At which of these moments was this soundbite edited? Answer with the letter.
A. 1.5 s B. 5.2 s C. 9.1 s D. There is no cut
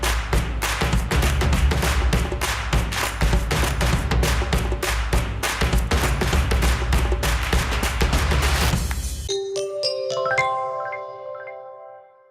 C